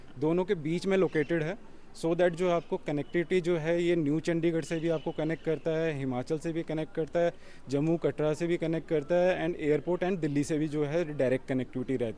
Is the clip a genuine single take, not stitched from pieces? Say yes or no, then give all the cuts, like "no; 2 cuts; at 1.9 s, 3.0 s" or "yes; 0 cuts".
yes; 0 cuts